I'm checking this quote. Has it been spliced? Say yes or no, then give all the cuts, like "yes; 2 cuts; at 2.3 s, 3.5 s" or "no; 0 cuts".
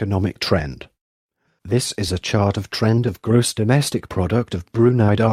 no; 0 cuts